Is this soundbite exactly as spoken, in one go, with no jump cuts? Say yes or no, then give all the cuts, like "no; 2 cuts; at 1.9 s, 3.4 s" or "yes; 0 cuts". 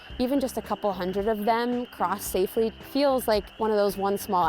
no; 2 cuts; at 2.8 s, 3.5 s